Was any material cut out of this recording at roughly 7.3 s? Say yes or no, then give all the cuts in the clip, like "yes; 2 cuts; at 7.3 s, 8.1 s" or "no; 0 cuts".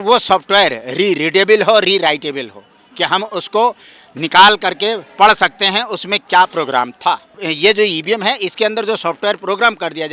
yes; 1 cut; at 7.3 s